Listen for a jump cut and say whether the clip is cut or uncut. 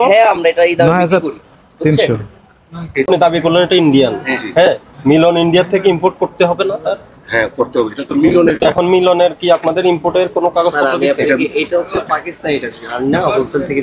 cut